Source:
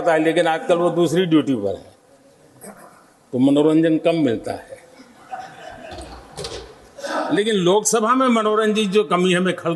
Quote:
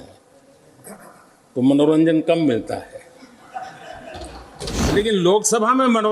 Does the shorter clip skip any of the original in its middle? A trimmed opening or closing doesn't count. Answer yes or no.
yes